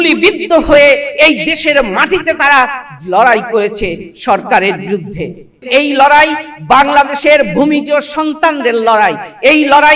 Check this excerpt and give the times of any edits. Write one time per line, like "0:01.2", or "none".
0:05.7